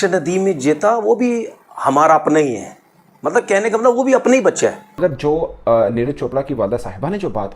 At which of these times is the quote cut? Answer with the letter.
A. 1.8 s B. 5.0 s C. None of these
B